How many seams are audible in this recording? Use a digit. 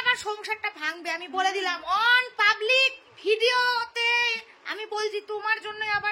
0